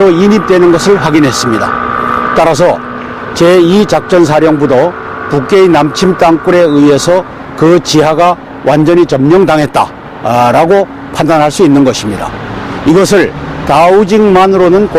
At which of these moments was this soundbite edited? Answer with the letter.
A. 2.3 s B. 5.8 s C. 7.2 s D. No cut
B